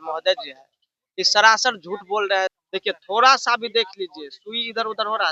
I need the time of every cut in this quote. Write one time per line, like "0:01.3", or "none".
0:02.5